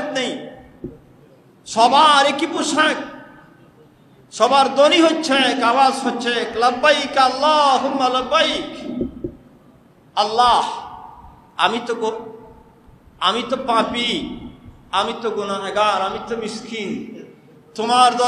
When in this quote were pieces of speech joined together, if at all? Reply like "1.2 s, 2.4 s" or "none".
none